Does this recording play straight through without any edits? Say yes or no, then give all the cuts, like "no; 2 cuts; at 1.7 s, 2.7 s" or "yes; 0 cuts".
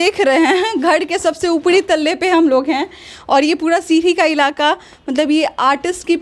yes; 0 cuts